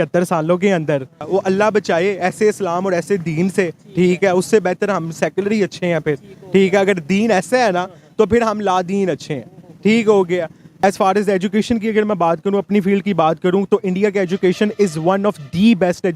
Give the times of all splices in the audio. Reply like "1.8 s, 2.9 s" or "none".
1.2 s, 10.8 s